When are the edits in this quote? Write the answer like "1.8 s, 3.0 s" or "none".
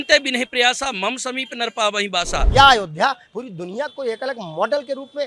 2.5 s